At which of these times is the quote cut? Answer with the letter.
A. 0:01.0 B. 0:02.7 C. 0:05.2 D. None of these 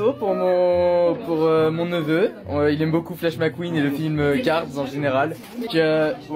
D